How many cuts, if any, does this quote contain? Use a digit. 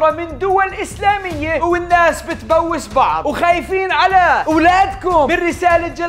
1